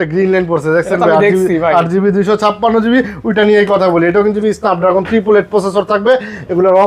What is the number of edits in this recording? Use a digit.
1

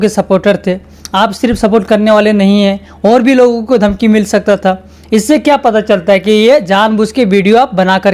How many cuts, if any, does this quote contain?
0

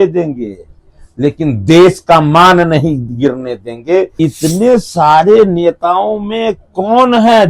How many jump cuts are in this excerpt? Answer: 1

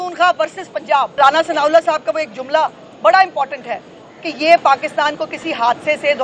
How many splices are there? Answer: 1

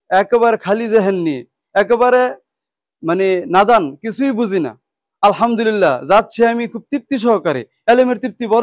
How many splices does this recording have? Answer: 0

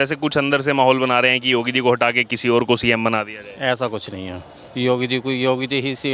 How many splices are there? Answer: 0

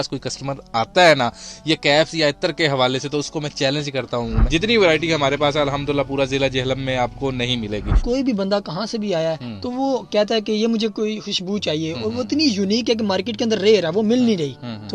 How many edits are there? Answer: 2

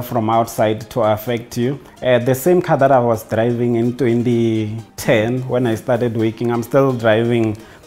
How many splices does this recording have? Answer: 2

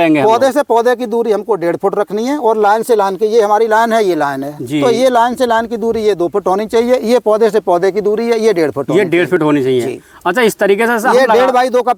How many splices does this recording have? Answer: 0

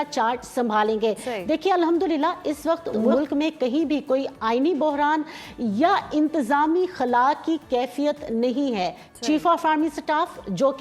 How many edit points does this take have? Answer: 0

